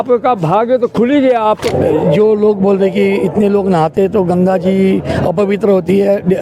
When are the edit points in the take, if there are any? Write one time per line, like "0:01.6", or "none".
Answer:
0:01.7